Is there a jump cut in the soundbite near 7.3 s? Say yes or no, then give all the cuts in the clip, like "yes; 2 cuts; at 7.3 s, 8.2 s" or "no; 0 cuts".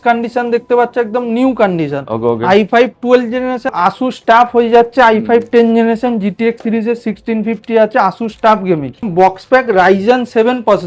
no; 2 cuts; at 3.7 s, 9.0 s